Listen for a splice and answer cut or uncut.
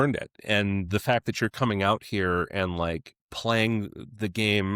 uncut